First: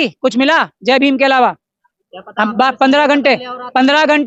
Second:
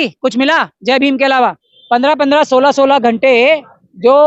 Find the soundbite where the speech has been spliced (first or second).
second